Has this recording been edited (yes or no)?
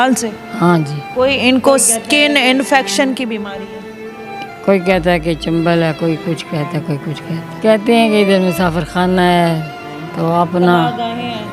yes